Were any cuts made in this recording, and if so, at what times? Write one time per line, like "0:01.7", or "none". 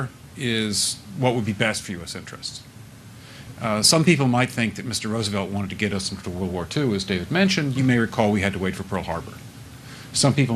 0:03.0
0:07.0